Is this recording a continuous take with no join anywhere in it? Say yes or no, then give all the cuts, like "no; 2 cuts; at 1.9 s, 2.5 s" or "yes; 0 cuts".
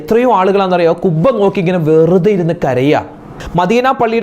no; 1 cut; at 3.3 s